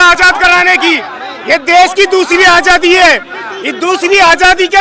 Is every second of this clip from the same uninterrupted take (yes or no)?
yes